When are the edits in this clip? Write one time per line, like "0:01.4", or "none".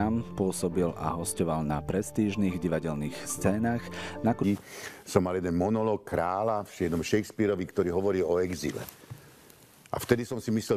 none